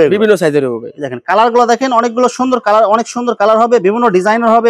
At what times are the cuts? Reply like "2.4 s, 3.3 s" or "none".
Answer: none